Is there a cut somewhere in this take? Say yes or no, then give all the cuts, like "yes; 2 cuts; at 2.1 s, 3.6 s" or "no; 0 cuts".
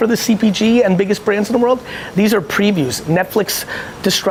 no; 0 cuts